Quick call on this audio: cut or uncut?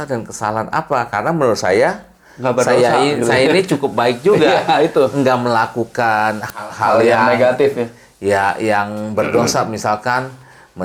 uncut